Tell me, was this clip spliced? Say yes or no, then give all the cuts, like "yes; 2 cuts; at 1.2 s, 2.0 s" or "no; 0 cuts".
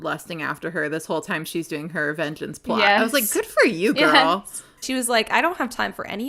yes; 1 cut; at 4.8 s